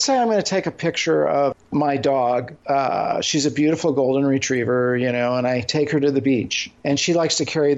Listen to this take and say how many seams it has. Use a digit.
3